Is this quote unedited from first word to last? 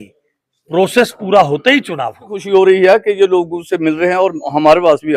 no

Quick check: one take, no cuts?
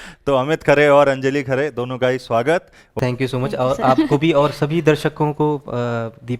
no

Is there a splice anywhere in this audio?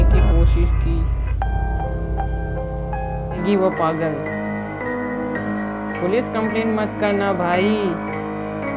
yes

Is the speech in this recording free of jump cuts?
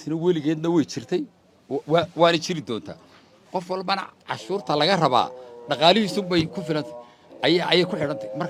yes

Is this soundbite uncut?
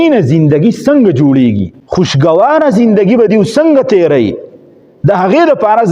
no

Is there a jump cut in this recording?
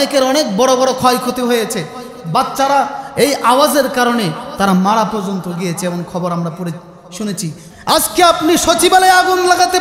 yes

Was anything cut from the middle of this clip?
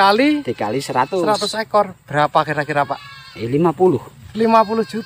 no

